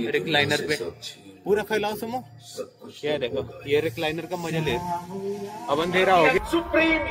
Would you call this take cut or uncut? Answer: uncut